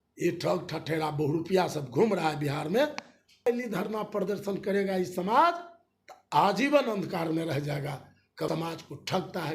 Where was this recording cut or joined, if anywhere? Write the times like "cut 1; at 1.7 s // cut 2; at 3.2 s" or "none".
cut 1; at 3.4 s // cut 2; at 8.5 s